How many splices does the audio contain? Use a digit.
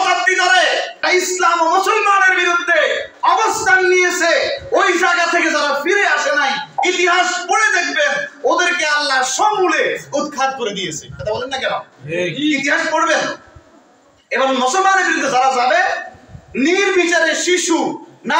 1